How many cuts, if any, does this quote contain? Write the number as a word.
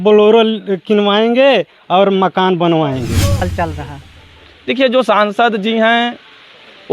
one